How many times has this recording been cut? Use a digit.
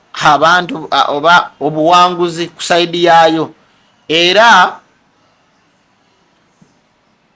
0